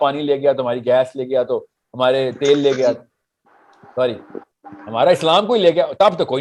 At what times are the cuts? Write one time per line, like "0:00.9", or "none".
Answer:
none